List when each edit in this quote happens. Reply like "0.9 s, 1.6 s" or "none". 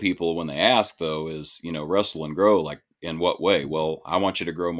none

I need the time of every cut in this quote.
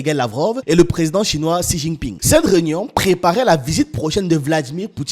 2.1 s

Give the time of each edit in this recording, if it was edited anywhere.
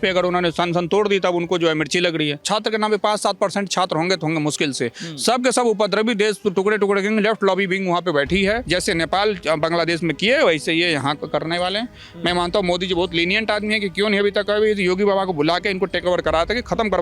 2.4 s, 8.6 s

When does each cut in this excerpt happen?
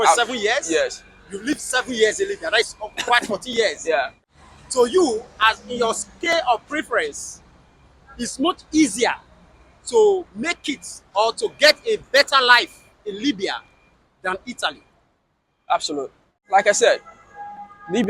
4.1 s, 16.4 s

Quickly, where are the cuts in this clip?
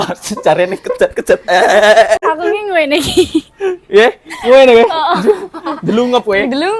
2.2 s

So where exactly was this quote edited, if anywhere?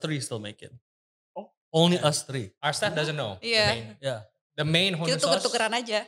none

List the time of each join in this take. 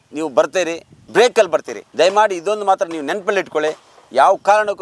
0.9 s, 1.8 s

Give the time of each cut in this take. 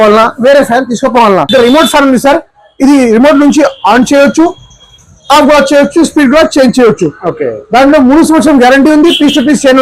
1.5 s

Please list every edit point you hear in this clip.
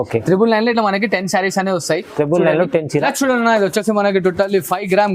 3.0 s

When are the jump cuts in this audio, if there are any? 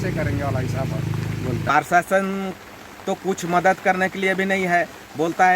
1.7 s

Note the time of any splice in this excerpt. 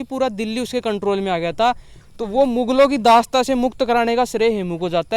2.0 s

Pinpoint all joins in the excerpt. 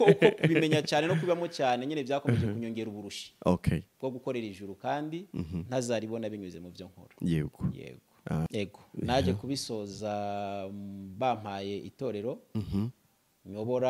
8.5 s

